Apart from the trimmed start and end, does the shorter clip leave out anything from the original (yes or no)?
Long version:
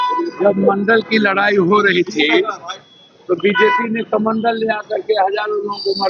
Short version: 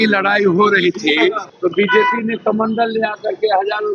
yes